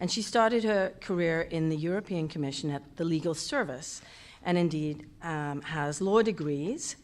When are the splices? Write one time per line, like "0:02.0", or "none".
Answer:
0:05.6